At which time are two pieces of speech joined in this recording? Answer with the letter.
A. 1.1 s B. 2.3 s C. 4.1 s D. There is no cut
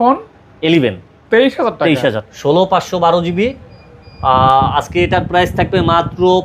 B